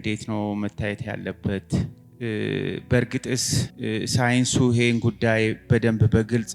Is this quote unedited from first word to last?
no; 2 cuts; at 2.0 s, 3.7 s

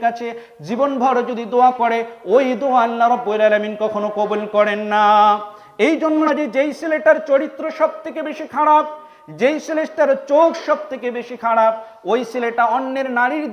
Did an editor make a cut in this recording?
yes; 1 cut; at 6.2 s

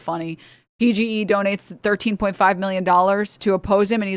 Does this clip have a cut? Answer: yes; 2 cuts; at 1.7 s, 3.3 s

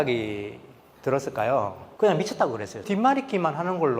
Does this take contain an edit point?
yes; 2 cuts; at 1.8 s, 2.8 s

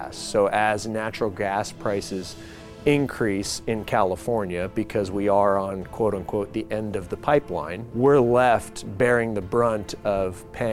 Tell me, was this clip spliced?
yes; 1 cut; at 7.8 s

